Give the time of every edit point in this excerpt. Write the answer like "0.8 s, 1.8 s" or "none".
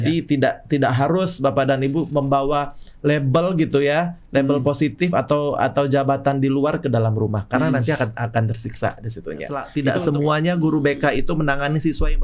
9.6 s